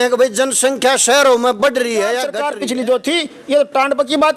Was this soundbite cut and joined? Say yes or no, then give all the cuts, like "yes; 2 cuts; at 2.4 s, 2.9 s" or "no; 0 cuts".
yes; 1 cut; at 2.4 s